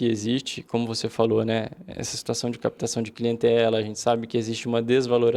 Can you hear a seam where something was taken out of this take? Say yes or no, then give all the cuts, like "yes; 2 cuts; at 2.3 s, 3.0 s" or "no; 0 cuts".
no; 0 cuts